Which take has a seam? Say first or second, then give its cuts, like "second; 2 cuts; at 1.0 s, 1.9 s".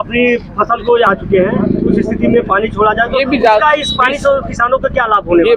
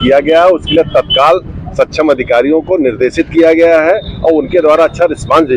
first; 1 cut; at 1.1 s